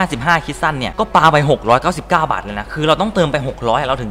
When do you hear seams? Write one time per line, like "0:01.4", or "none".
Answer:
none